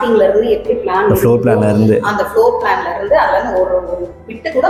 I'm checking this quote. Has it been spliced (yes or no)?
no